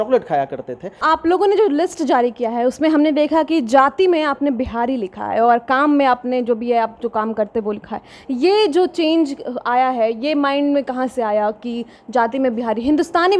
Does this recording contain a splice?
yes; 1 cut; at 1.0 s

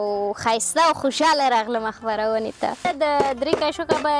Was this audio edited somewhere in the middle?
yes; 1 cut; at 2.8 s

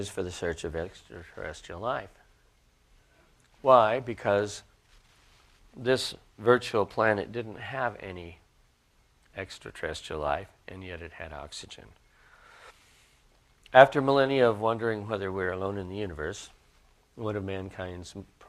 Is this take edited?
no; 0 cuts

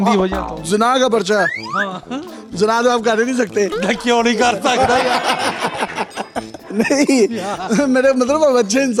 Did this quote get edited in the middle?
no; 0 cuts

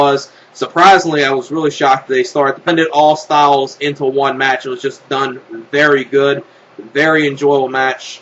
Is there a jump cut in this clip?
no; 0 cuts

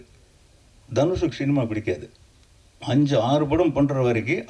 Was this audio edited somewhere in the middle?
no; 0 cuts

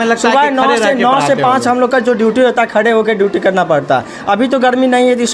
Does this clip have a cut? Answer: no; 0 cuts

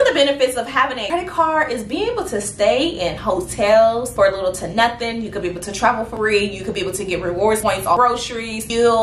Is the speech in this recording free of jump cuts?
no; 3 cuts; at 1.0 s, 6.1 s, 7.7 s

